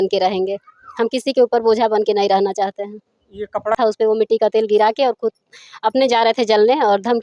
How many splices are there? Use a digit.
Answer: 1